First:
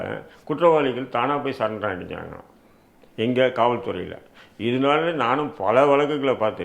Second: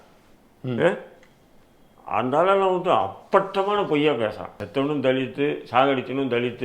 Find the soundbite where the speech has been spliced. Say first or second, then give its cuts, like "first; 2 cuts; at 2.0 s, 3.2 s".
second; 1 cut; at 4.5 s